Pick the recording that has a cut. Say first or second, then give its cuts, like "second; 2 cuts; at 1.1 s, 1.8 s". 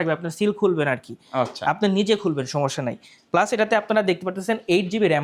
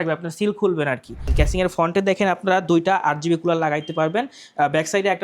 second; 1 cut; at 1.2 s